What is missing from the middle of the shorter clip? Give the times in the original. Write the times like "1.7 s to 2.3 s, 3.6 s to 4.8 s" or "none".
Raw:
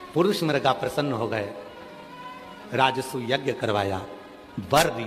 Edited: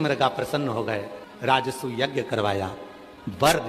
1.7 s to 2.5 s